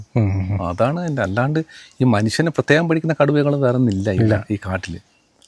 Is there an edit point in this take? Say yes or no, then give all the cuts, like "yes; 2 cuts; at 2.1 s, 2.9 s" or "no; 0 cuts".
no; 0 cuts